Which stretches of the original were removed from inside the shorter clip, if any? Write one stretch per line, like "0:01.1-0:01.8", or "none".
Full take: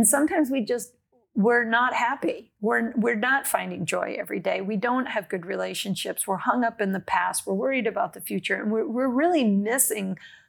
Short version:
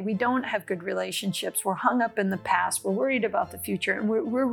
none